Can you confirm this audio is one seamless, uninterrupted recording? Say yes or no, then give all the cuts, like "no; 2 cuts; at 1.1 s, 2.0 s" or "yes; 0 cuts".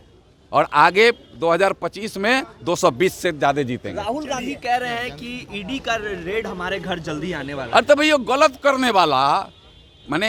yes; 0 cuts